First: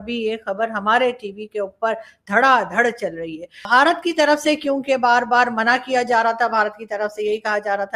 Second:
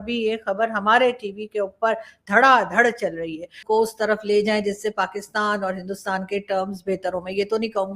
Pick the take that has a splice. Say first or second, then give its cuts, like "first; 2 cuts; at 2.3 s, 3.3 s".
second; 1 cut; at 3.5 s